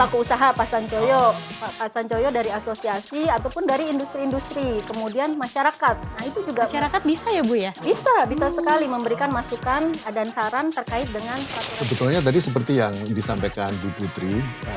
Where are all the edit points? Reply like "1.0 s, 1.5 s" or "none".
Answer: 11.6 s